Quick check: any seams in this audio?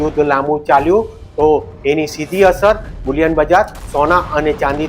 no; 0 cuts

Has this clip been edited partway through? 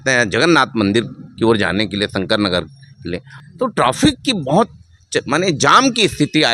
yes; 1 cut; at 3.3 s

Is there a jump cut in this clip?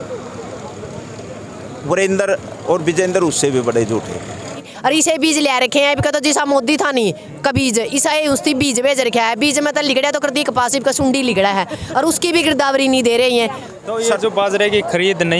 yes; 2 cuts; at 4.6 s, 13.6 s

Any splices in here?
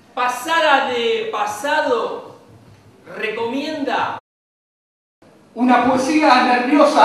no; 0 cuts

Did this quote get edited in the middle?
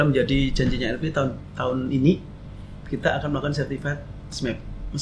no; 0 cuts

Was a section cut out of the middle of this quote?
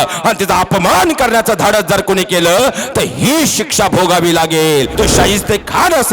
yes; 1 cut; at 4.9 s

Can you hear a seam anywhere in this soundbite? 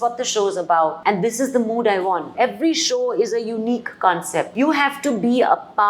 yes; 1 cut; at 2.3 s

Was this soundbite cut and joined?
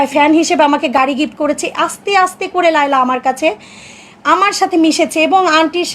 no; 0 cuts

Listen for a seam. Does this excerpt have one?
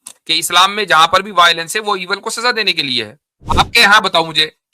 yes; 1 cut; at 3.4 s

